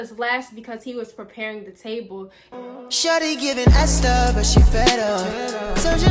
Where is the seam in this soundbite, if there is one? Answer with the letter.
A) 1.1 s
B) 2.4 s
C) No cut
B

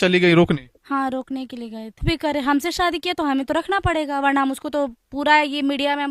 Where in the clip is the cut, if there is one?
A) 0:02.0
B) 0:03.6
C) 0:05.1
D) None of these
A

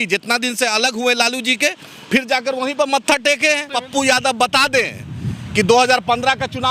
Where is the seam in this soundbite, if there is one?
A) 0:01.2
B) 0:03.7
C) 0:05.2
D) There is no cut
B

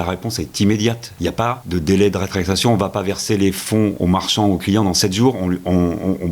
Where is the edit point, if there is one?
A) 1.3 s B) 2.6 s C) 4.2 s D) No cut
A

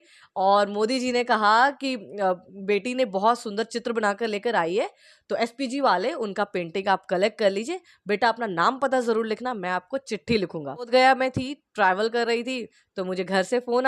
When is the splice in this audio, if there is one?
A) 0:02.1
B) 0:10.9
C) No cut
B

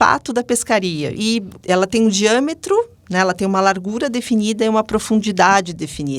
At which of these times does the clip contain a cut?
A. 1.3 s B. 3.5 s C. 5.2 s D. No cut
A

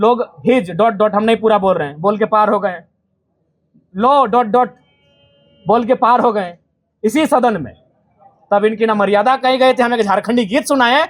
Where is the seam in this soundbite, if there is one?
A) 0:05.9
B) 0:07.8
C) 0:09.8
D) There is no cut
D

